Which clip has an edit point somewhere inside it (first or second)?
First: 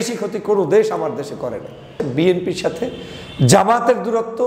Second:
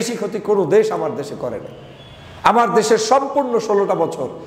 first